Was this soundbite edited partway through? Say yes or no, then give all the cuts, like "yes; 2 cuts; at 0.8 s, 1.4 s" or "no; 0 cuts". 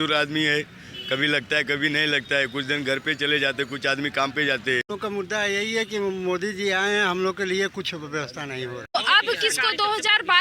yes; 2 cuts; at 4.9 s, 8.9 s